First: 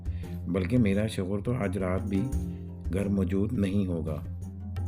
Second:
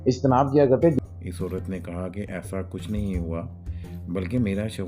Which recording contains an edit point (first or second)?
second